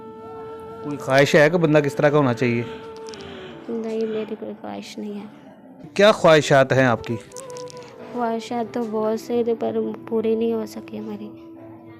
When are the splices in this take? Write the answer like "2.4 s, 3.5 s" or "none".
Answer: 5.9 s